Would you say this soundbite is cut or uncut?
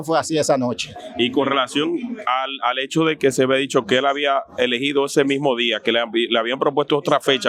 uncut